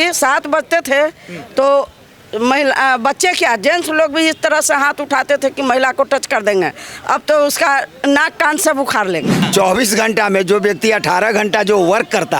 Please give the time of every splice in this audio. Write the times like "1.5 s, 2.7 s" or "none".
9.4 s